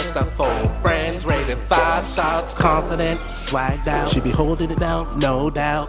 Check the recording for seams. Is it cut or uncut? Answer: uncut